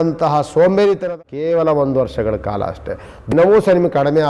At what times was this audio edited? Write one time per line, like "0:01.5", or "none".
0:01.0
0:03.3